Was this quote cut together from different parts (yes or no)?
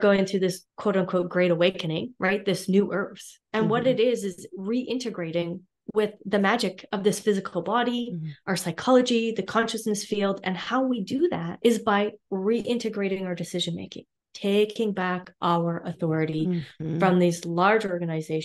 no